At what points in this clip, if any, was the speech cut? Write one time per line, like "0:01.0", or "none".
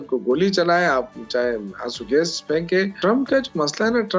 0:02.9